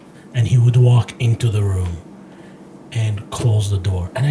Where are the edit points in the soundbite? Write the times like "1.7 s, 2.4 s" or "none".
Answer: none